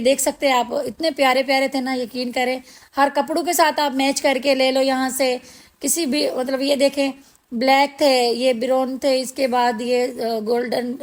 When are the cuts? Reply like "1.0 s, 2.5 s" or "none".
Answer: none